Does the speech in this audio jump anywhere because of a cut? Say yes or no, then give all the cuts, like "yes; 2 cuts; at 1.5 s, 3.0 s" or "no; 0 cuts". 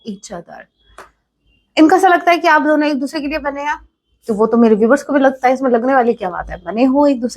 no; 0 cuts